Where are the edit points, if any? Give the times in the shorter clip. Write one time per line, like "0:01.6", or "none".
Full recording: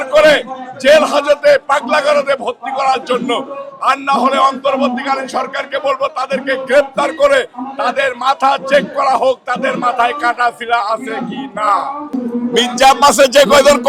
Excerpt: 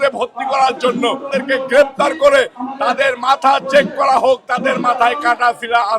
0:01.2

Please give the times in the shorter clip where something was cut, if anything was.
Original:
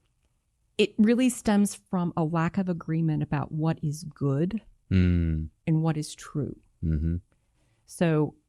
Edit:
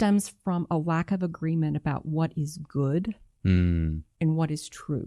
none

